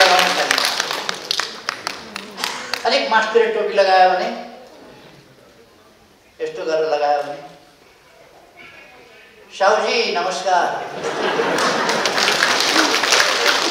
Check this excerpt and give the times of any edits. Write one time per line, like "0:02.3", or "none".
0:02.9